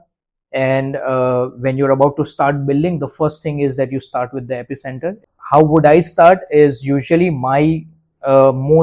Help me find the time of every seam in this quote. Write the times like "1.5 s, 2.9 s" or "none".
5.3 s